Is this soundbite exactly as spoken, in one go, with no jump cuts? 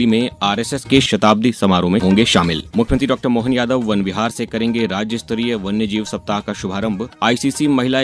no; 2 cuts; at 2.6 s, 7.1 s

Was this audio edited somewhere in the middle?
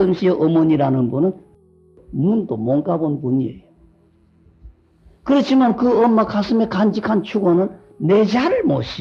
yes; 1 cut; at 1.9 s

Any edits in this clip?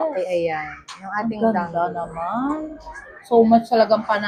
no; 0 cuts

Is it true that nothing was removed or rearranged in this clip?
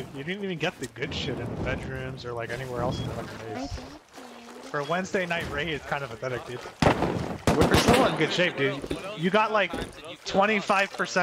no; 1 cut; at 7.3 s

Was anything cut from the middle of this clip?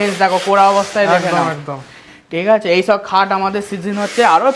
no; 0 cuts

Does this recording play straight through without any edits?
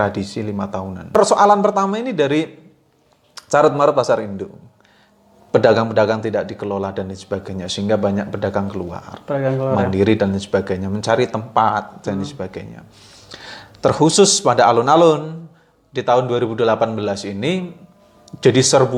yes; 0 cuts

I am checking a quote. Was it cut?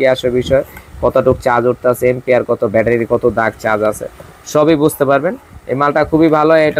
no; 0 cuts

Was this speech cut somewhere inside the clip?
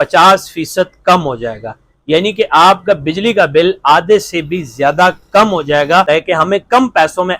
yes; 1 cut; at 6.1 s

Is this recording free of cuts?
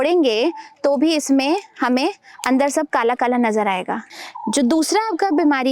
no; 1 cut; at 4.0 s

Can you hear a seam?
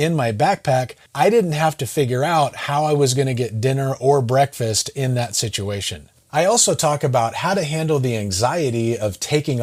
no; 0 cuts

